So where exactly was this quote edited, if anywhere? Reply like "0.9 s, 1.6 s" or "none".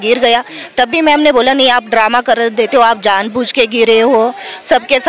none